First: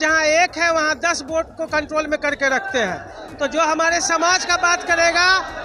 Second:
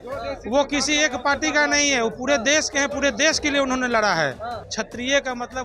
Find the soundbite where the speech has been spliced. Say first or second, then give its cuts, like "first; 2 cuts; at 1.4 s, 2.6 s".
second; 1 cut; at 4.6 s